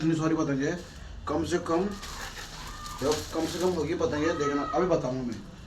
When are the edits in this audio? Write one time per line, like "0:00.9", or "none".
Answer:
none